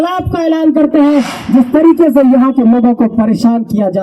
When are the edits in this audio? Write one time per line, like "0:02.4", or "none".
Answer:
0:01.3